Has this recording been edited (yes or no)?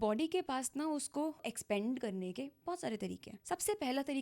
yes